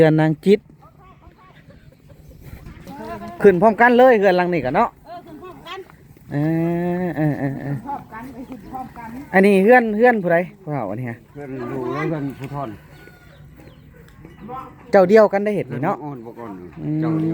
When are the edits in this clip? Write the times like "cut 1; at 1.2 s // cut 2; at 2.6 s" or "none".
cut 1; at 2.9 s

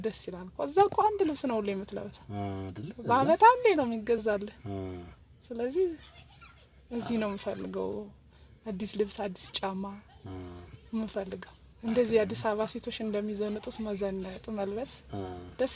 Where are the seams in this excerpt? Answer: none

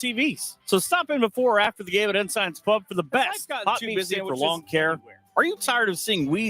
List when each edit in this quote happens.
cut 1; at 3.9 s

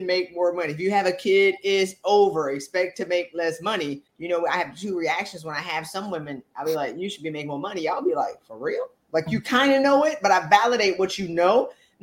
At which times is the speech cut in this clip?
cut 1; at 4.1 s

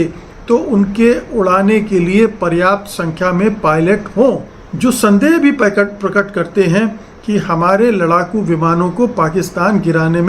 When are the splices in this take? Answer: cut 1; at 4.7 s

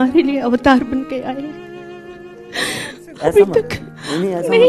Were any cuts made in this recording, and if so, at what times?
none

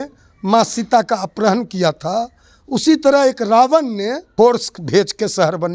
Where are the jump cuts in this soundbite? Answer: cut 1; at 4.2 s

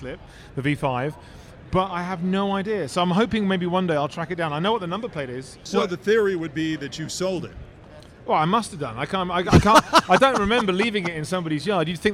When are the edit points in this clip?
cut 1; at 5.5 s

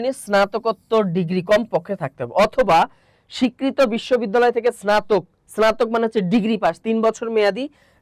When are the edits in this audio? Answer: none

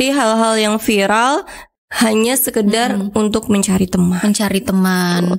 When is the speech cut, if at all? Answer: none

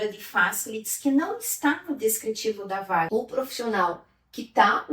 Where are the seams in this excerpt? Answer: cut 1; at 3.1 s

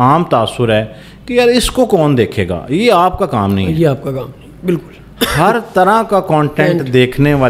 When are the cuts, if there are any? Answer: none

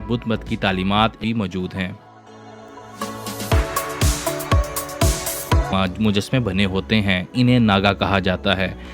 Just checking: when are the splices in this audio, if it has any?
cut 1; at 1.2 s // cut 2; at 5.7 s

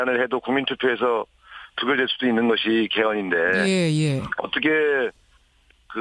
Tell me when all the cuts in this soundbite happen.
none

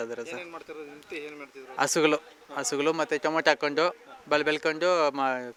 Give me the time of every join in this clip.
none

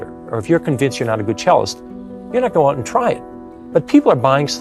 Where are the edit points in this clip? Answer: none

